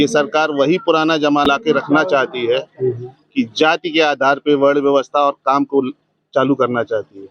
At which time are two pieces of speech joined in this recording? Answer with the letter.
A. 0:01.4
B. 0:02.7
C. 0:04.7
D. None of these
A